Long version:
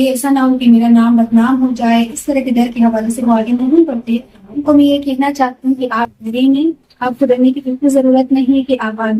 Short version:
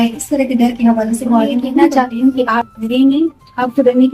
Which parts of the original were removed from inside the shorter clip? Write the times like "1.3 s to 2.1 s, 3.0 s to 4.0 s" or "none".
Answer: 3.9 s to 5.4 s